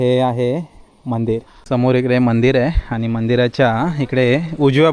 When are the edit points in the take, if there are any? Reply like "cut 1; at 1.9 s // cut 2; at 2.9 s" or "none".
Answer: cut 1; at 1.5 s